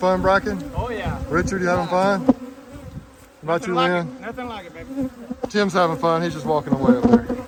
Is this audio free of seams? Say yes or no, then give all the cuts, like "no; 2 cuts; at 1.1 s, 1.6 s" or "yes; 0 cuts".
yes; 0 cuts